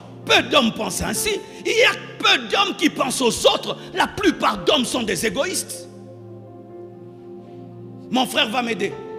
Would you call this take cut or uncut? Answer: uncut